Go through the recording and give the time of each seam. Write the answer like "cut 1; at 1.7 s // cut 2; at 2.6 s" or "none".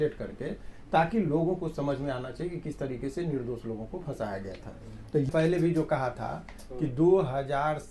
cut 1; at 5.3 s